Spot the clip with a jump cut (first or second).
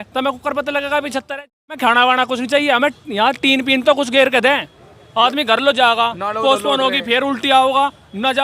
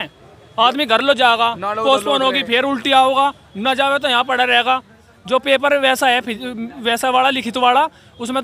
first